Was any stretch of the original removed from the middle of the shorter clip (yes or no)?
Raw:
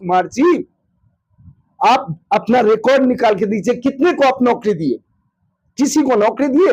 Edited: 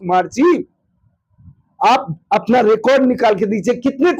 no